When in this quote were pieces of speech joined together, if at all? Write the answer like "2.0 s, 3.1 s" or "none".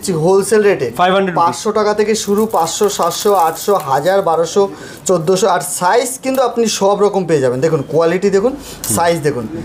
none